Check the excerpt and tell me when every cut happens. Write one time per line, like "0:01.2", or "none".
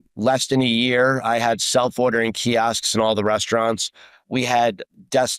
none